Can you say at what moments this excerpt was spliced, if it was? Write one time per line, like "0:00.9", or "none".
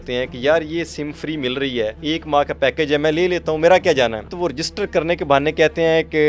0:02.0
0:04.3